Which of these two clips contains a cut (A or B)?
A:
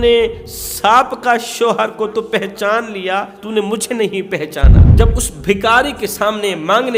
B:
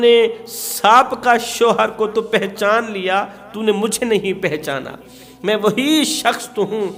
A